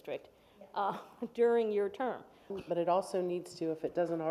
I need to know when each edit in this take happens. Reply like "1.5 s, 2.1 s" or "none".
2.5 s